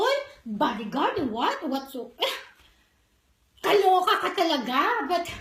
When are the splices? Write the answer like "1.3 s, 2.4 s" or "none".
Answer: none